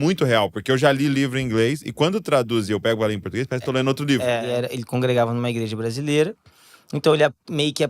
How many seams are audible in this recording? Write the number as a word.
one